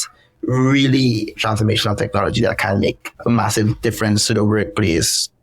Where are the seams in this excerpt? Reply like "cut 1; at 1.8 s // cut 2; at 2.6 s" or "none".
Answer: cut 1; at 1.4 s